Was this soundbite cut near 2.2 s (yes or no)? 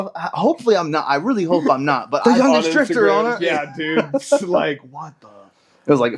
yes